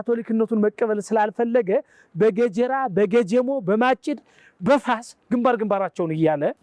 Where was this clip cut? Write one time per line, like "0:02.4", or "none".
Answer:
none